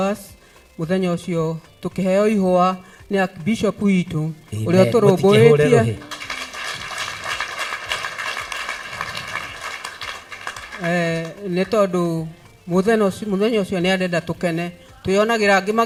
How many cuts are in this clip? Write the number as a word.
zero